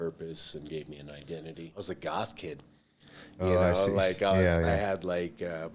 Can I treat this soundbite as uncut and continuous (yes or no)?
no